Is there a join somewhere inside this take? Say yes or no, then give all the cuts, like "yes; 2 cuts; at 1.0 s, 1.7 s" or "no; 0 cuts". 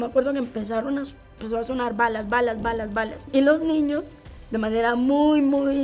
yes; 1 cut; at 3.2 s